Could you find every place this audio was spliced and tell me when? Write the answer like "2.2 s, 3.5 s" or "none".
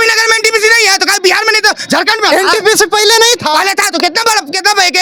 none